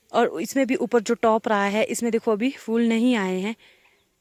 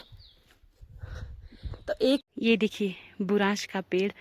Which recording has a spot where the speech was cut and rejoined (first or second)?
second